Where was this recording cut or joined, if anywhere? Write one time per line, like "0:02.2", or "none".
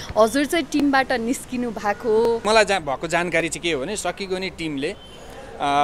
0:02.4